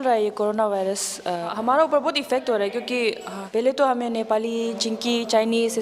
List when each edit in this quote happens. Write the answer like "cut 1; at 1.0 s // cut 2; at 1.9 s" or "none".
cut 1; at 1.5 s // cut 2; at 3.3 s